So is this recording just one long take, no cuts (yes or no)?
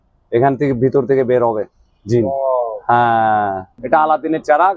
no